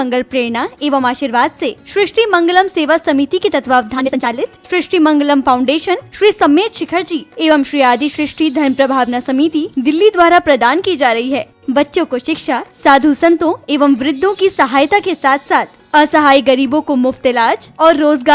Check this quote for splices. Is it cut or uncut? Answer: cut